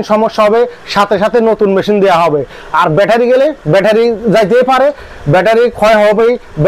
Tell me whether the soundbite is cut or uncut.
uncut